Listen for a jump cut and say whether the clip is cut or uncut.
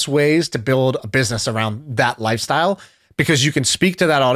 uncut